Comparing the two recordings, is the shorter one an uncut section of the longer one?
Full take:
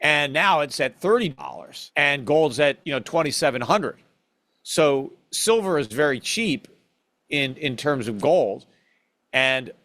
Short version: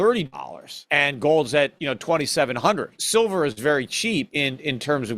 no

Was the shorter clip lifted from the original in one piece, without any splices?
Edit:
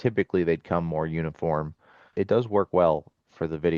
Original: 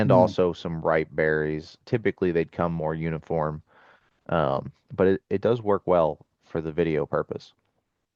no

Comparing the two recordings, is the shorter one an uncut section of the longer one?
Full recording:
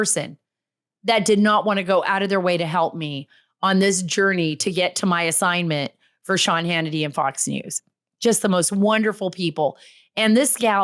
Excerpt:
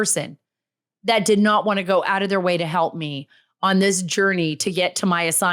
yes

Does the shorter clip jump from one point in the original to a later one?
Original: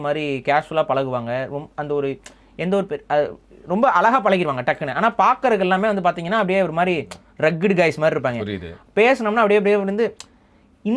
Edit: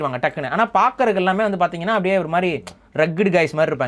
no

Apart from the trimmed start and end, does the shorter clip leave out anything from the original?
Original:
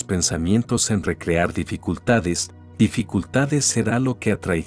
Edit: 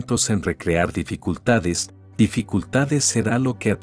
no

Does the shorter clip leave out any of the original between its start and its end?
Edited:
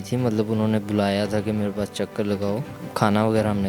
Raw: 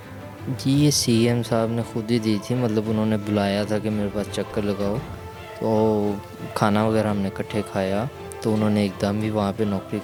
yes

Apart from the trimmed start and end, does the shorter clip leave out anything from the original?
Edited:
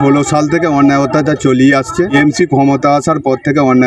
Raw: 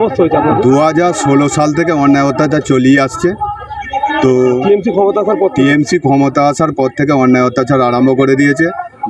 yes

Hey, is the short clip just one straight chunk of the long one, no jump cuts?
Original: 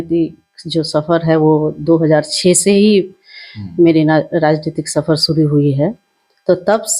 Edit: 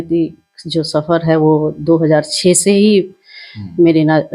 yes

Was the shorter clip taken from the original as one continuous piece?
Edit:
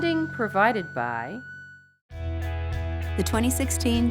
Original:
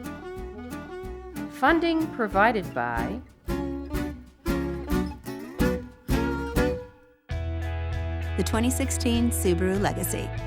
no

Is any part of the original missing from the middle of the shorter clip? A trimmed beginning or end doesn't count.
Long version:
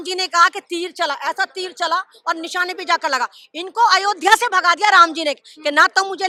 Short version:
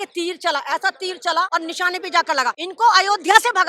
yes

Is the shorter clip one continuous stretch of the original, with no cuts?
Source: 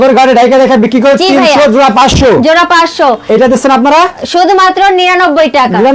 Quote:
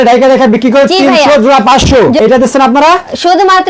no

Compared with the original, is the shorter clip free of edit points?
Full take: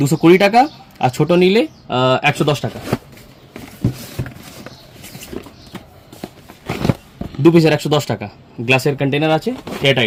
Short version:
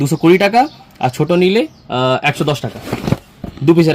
no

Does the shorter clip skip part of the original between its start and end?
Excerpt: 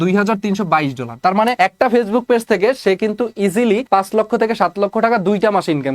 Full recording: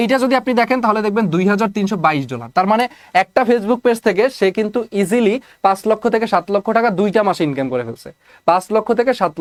yes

